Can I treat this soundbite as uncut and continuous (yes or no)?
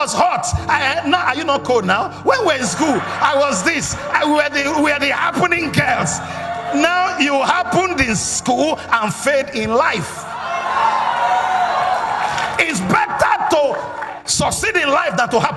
yes